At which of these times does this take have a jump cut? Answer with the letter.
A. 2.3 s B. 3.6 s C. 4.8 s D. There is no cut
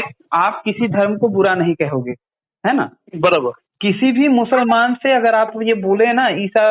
B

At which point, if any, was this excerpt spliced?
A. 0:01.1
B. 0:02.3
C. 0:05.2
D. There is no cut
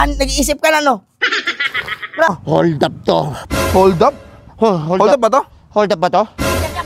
B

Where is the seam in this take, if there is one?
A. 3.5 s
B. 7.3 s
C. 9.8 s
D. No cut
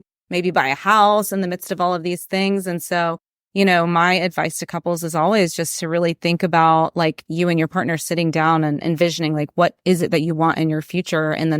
D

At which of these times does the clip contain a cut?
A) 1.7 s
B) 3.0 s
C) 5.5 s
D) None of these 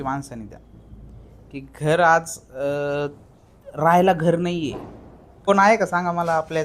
C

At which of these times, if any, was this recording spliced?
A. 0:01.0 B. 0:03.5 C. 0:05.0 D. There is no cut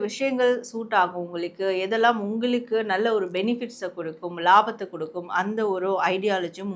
D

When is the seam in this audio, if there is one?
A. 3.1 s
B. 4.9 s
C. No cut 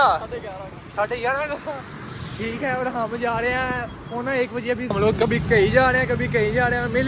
B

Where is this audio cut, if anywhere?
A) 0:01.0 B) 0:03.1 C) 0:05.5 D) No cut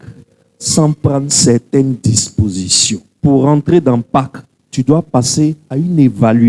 B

